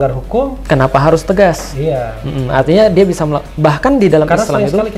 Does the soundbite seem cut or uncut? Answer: uncut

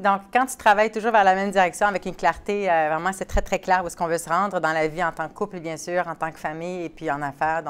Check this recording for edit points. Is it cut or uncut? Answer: uncut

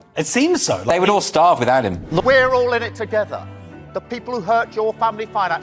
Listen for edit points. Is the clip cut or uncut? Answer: cut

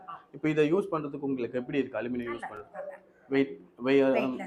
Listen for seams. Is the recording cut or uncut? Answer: uncut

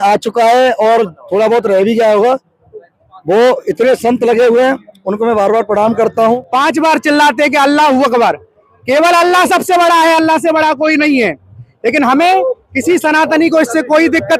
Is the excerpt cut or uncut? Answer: cut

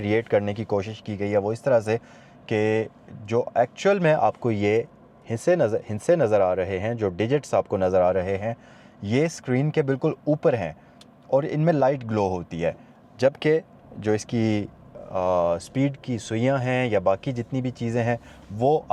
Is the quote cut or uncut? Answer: uncut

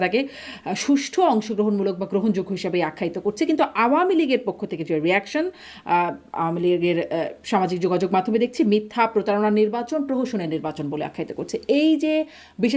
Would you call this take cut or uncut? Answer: uncut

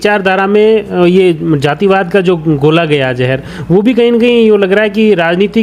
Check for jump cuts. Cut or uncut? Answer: uncut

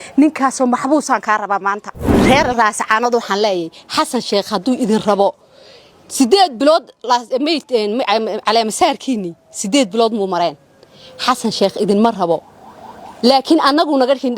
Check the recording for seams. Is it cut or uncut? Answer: cut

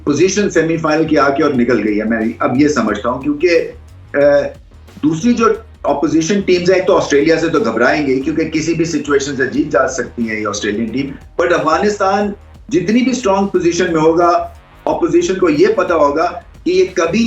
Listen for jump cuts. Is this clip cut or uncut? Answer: uncut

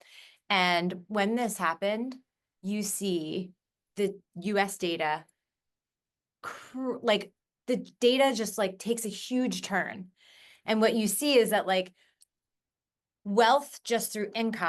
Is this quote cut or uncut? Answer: uncut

